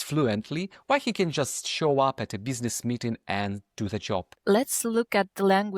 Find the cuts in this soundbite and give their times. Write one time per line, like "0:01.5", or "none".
0:04.3